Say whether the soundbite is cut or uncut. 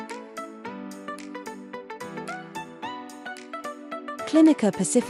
uncut